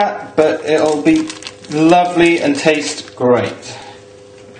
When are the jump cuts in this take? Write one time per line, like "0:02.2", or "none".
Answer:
0:01.2